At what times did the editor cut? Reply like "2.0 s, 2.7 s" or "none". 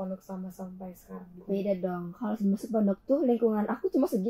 none